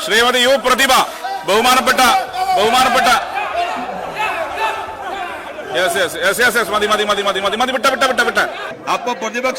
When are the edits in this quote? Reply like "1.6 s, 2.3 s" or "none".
8.6 s